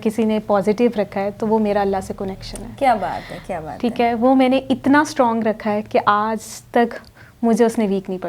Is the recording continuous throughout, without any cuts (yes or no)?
yes